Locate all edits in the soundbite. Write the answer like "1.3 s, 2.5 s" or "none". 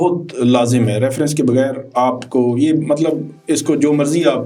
none